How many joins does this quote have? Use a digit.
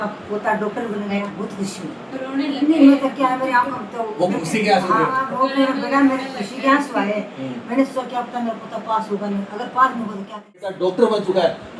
3